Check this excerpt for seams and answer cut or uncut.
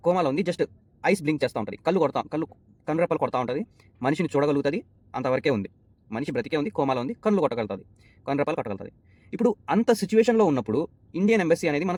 uncut